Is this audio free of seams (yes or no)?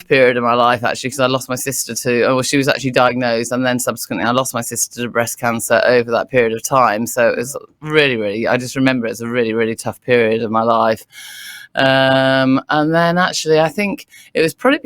yes